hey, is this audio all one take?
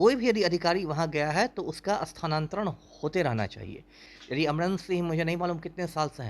no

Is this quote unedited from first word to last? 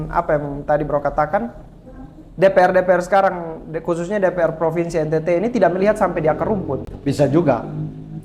yes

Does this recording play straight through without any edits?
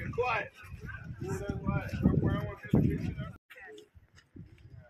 yes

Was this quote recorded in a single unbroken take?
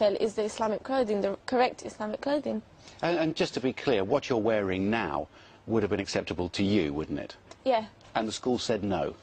yes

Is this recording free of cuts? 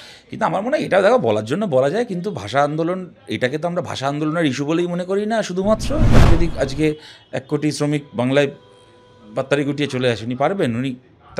no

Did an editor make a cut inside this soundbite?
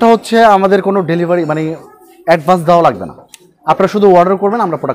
no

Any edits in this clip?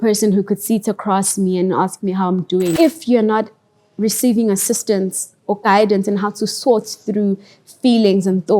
yes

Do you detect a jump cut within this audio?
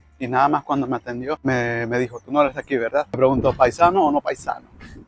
yes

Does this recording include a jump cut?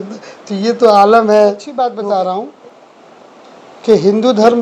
yes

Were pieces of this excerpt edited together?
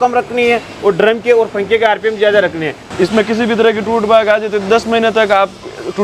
yes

